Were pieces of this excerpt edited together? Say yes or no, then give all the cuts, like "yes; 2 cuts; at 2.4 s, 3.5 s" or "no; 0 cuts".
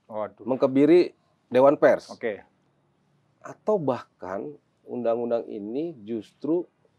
no; 0 cuts